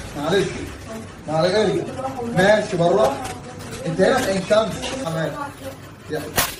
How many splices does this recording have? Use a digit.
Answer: 1